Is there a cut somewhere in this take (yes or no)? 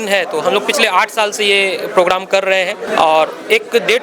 yes